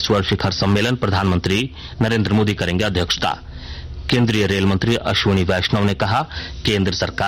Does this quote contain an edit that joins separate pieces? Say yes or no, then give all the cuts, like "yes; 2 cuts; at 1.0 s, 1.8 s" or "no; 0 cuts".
no; 0 cuts